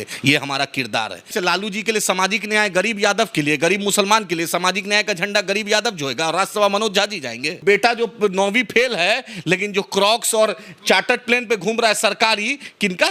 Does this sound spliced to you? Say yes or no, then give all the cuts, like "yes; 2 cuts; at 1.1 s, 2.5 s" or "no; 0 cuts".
yes; 2 cuts; at 1.3 s, 7.6 s